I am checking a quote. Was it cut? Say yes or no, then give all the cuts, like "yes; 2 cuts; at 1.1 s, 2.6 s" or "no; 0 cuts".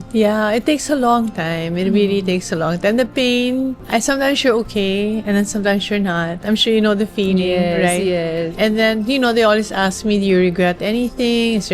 no; 0 cuts